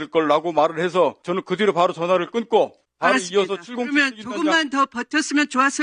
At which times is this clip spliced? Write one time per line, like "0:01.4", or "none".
0:01.2
0:02.8